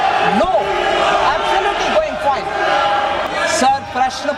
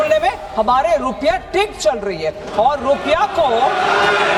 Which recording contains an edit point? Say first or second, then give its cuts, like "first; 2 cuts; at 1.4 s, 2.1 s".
first; 1 cut; at 3.3 s